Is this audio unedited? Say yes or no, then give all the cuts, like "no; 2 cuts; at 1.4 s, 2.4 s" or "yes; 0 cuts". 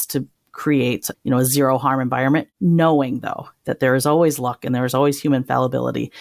no; 1 cut; at 2.5 s